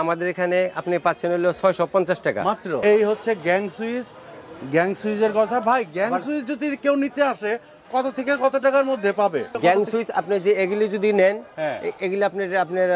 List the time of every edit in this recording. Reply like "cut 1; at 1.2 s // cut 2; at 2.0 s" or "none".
cut 1; at 2.8 s // cut 2; at 9.5 s